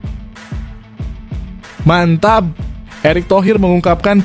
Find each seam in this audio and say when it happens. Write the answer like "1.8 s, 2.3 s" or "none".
1.8 s